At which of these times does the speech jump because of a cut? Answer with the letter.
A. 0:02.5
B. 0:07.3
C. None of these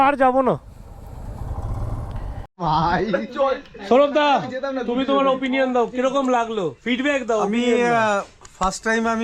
A